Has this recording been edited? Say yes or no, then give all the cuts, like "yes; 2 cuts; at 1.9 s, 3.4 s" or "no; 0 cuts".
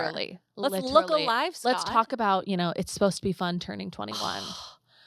no; 0 cuts